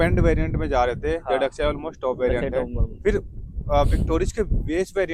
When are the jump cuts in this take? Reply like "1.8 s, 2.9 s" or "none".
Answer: none